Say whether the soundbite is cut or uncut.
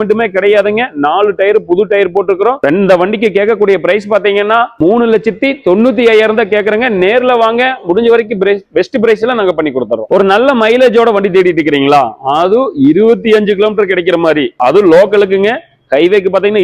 uncut